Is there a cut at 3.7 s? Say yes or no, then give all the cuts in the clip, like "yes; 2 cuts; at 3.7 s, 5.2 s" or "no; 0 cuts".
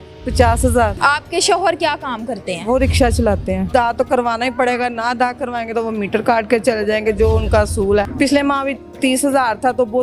yes; 3 cuts; at 1.0 s, 3.7 s, 8.1 s